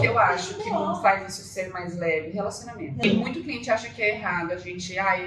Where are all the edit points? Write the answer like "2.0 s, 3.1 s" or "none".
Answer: 3.0 s